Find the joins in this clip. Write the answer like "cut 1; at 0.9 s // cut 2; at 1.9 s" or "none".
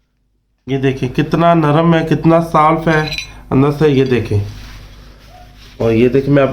none